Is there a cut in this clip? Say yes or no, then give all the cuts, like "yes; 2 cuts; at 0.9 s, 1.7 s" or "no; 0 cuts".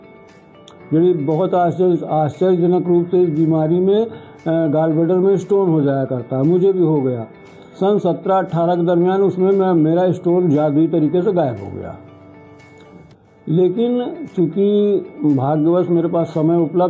no; 0 cuts